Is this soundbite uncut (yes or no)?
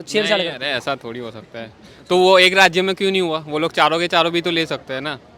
yes